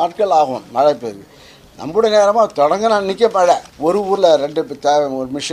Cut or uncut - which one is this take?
cut